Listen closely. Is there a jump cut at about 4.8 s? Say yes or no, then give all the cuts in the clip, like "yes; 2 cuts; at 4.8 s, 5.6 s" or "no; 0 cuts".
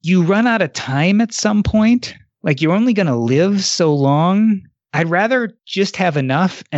yes; 2 cuts; at 4.8 s, 5.6 s